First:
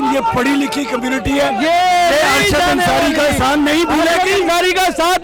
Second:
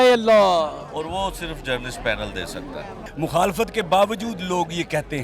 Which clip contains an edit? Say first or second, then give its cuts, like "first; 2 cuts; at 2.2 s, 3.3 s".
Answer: second; 1 cut; at 3.0 s